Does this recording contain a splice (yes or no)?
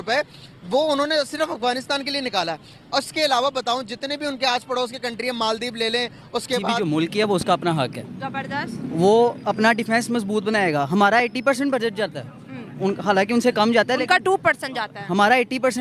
yes